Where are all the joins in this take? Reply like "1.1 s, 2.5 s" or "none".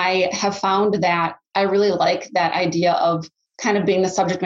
1.4 s